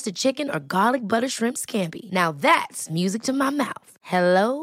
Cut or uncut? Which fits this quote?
uncut